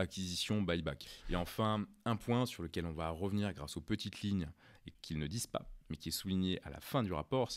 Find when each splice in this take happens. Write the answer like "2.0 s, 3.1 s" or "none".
1.1 s, 4.9 s